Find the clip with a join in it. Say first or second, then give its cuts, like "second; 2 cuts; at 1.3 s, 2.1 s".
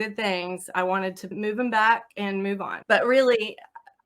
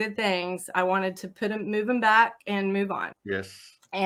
first; 2 cuts; at 1.3 s, 2.7 s